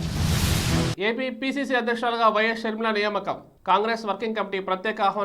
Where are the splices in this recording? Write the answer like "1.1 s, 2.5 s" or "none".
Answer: 0.9 s